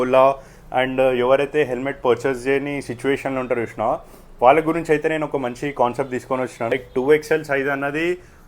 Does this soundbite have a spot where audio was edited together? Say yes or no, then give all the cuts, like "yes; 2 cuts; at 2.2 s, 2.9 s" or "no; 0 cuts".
yes; 1 cut; at 6.7 s